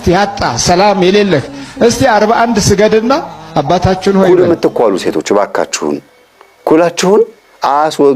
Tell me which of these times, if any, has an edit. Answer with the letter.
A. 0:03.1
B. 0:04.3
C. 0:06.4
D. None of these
B